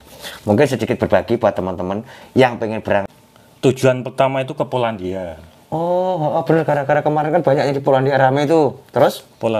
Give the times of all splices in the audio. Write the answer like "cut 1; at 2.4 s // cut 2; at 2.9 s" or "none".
cut 1; at 3.1 s